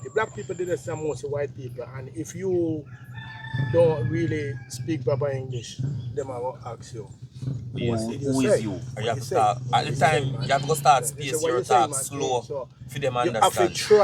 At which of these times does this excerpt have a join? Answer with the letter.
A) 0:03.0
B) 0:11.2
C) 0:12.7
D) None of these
D